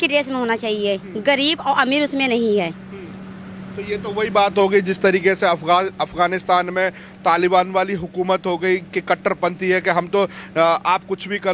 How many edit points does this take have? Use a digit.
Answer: 0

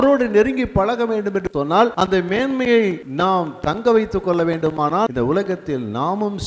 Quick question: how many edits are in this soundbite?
3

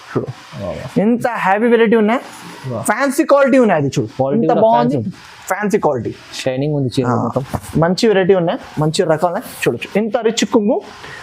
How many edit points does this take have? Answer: 1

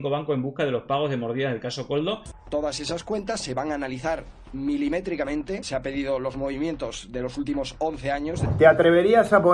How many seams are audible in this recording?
3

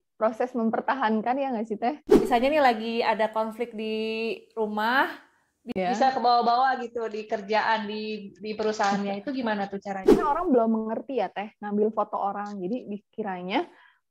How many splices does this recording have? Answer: 2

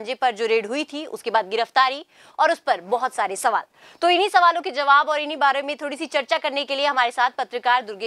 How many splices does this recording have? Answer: 0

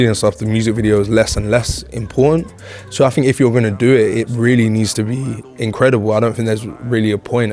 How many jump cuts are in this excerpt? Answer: 0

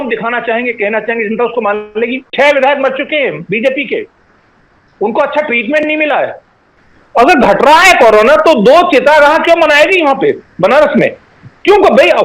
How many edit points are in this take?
2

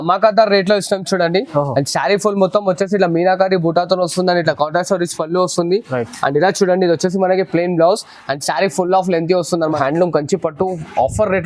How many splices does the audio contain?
1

